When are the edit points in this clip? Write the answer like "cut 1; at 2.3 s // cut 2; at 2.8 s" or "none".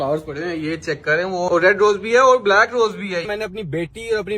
cut 1; at 1.5 s // cut 2; at 3.3 s